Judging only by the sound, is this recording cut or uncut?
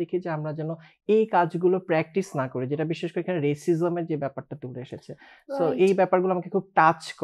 uncut